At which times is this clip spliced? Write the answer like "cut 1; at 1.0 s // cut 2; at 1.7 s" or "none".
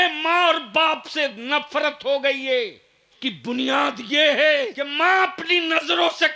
cut 1; at 3.2 s // cut 2; at 4.8 s